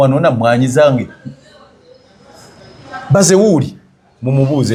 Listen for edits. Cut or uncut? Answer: uncut